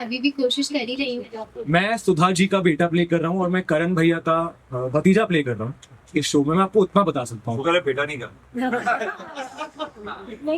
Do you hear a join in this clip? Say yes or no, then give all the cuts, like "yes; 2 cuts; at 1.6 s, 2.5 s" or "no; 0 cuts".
yes; 1 cut; at 1.5 s